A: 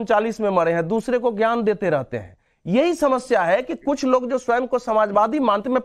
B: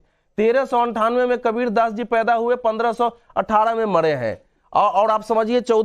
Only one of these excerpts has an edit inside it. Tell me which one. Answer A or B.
A